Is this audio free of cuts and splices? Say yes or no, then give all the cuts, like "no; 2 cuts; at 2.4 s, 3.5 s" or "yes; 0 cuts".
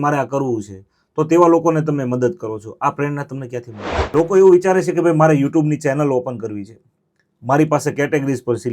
no; 1 cut; at 4.1 s